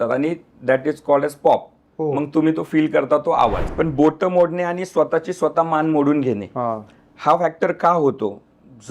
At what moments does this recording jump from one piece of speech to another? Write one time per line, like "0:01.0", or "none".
0:03.6